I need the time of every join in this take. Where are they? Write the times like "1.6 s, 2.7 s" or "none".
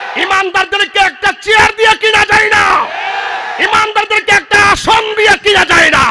none